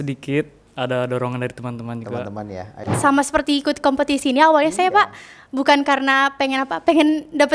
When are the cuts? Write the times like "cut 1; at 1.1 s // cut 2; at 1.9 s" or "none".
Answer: cut 1; at 2.8 s

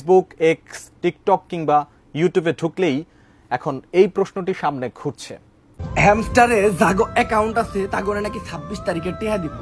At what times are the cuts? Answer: cut 1; at 5.7 s

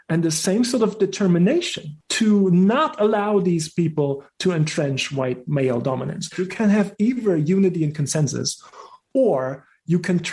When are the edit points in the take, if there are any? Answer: cut 1; at 6.4 s

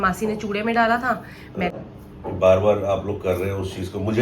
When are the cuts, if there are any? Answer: cut 1; at 1.7 s

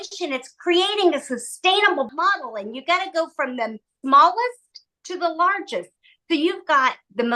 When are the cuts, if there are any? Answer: cut 1; at 2.1 s // cut 2; at 3.9 s

